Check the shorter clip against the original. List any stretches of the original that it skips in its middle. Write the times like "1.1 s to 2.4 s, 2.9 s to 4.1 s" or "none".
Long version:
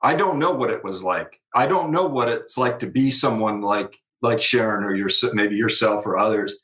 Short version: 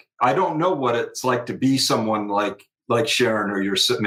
none